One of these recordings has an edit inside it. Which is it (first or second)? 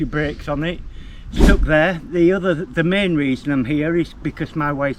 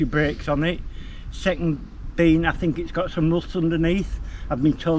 first